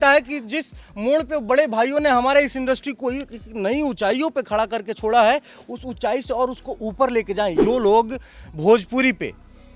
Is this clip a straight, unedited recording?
no; 1 cut; at 7.6 s

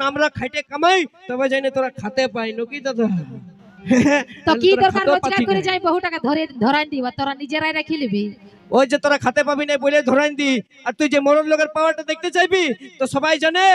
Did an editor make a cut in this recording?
no; 0 cuts

